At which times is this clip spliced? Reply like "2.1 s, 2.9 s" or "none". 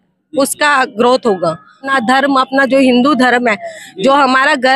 1.8 s